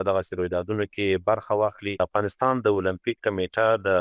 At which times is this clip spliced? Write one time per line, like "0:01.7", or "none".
0:02.0